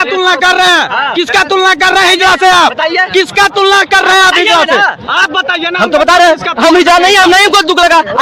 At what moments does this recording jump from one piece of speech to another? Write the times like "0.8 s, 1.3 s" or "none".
none